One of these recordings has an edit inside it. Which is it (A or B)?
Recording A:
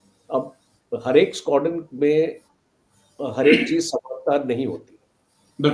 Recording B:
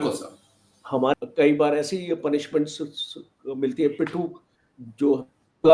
B